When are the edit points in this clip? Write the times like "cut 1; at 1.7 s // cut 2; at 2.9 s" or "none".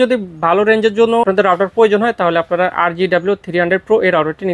cut 1; at 1.2 s